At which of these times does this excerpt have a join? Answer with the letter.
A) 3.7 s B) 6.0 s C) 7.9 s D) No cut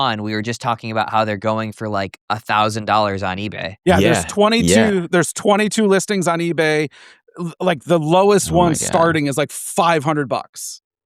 A